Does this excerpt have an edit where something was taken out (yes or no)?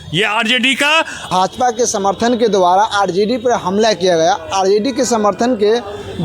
yes